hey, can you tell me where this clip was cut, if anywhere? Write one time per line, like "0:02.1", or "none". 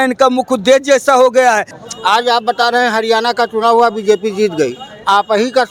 0:01.7

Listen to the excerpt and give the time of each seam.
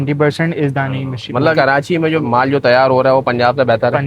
0:01.5

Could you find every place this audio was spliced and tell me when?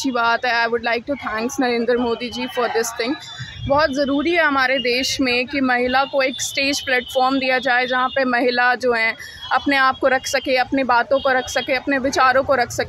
none

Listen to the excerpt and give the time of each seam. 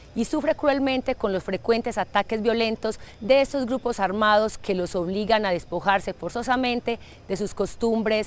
none

